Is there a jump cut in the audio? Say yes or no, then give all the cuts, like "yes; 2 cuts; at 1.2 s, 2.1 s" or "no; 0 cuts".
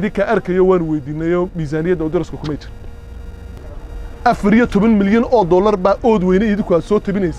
yes; 1 cut; at 3.6 s